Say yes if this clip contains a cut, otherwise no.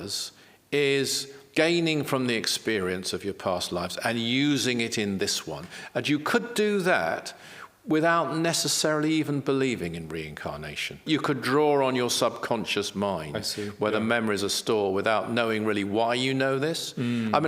yes